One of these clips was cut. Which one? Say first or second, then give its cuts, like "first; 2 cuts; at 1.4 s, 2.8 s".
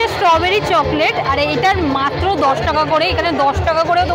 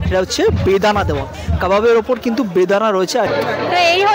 second; 2 cuts; at 1.4 s, 3.3 s